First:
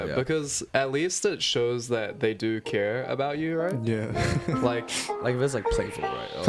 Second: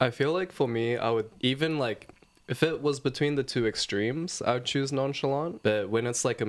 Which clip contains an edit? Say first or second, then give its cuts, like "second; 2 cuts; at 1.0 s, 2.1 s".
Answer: second; 2 cuts; at 1.3 s, 5.5 s